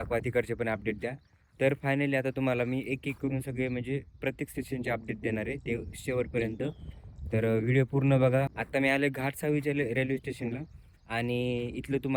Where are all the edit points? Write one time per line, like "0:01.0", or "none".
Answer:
none